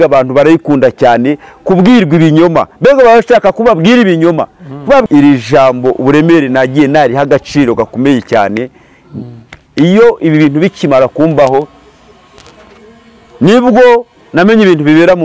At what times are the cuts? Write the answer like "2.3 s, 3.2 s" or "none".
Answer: 5.1 s